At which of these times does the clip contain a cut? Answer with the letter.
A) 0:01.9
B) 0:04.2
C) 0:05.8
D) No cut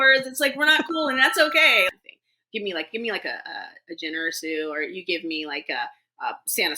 A